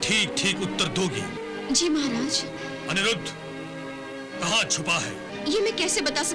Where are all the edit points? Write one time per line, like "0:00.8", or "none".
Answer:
0:01.4
0:05.3

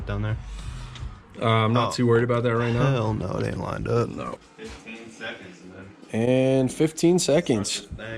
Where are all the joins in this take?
0:04.4

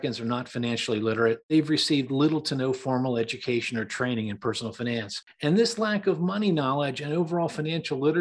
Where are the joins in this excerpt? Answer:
0:01.4
0:05.2

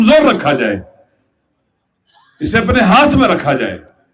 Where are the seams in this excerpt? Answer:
none

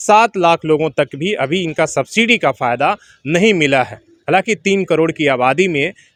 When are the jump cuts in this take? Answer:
none

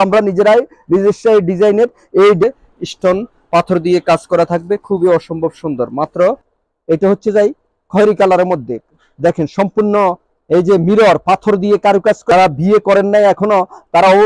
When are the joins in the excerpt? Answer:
0:02.4
0:06.5
0:12.2

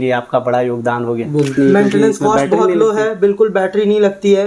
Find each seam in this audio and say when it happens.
0:01.5

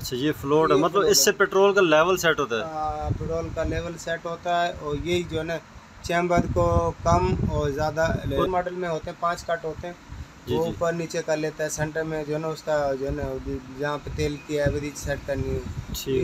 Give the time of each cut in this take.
0:08.5

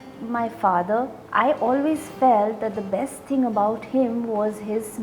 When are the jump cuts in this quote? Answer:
0:01.2

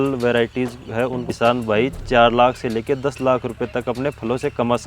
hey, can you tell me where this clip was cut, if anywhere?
0:01.3

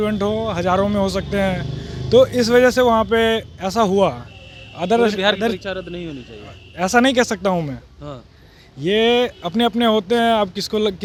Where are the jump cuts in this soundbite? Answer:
none

